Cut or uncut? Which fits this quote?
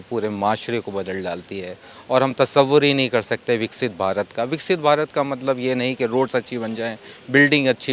uncut